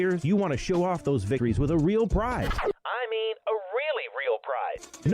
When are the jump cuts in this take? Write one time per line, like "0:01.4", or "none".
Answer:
0:01.4
0:02.5
0:04.4